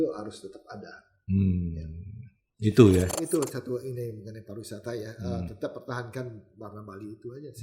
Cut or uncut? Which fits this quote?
cut